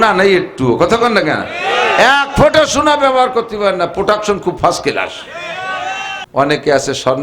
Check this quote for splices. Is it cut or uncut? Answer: cut